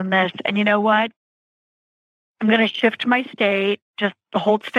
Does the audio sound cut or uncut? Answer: uncut